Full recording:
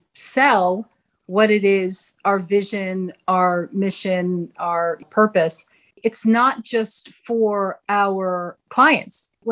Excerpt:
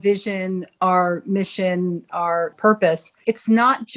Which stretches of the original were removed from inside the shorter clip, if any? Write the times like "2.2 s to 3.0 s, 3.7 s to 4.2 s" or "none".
5.2 s to 5.5 s